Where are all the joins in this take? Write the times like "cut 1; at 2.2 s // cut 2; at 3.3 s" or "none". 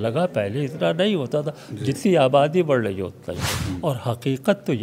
cut 1; at 3.5 s

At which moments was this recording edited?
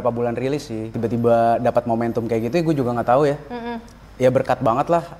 cut 1; at 1.0 s

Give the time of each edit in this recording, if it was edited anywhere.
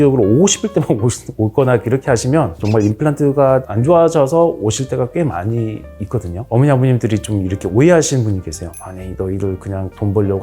cut 1; at 6.5 s

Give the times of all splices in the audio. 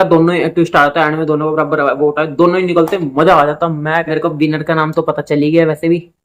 cut 1; at 4.1 s

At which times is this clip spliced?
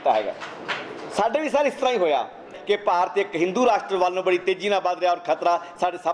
cut 1; at 2.5 s

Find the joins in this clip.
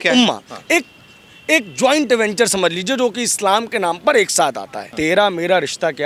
cut 1; at 4.9 s

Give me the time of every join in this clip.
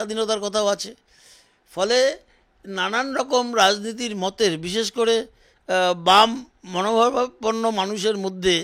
none

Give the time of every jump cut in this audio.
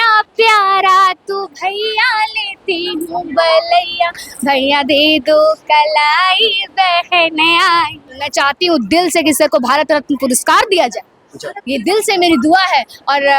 cut 1; at 8.2 s

